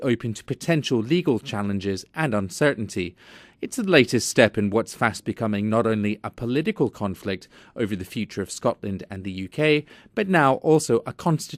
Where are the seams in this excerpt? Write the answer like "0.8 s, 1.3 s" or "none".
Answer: none